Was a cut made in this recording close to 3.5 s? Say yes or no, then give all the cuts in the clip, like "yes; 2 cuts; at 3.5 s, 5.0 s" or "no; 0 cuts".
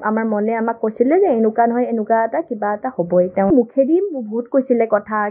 yes; 1 cut; at 3.5 s